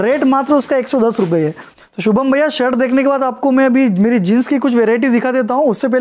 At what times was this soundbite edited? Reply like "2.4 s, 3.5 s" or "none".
1.8 s